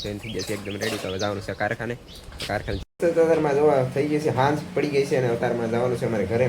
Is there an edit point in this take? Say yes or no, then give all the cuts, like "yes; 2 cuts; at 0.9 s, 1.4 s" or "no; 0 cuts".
yes; 1 cut; at 2.8 s